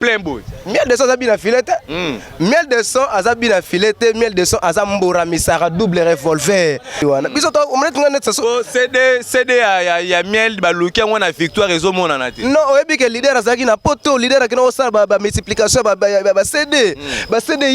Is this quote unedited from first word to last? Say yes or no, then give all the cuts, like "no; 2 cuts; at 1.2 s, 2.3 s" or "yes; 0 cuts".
no; 1 cut; at 7.0 s